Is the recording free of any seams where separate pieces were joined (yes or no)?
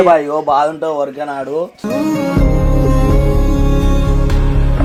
yes